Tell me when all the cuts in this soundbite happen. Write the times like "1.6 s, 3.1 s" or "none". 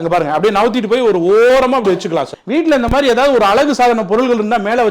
2.4 s